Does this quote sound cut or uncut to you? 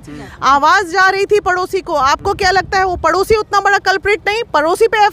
uncut